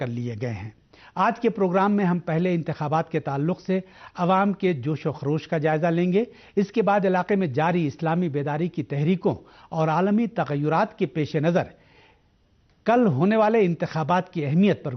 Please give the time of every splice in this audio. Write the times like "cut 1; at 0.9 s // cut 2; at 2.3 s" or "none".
cut 1; at 1.4 s